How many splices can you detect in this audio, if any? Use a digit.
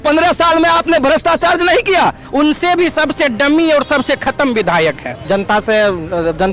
2